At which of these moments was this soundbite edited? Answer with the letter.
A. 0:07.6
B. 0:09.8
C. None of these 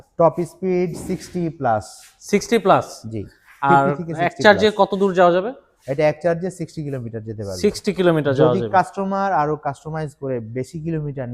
C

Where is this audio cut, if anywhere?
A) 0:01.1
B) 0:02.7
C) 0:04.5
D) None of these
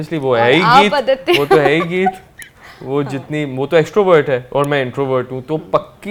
D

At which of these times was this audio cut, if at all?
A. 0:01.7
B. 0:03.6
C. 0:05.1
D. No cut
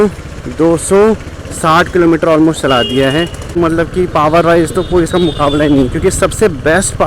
B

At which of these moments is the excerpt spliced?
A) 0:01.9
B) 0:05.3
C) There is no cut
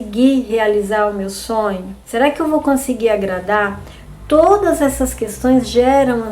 A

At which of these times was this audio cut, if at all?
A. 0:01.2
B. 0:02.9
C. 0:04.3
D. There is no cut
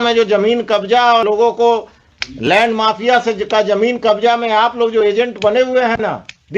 A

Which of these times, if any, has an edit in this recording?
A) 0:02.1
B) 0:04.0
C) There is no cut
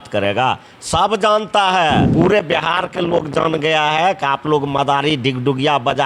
A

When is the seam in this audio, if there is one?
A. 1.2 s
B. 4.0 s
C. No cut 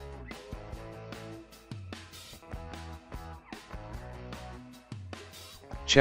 C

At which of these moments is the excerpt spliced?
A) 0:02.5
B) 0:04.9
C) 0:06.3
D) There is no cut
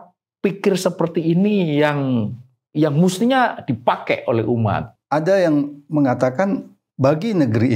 B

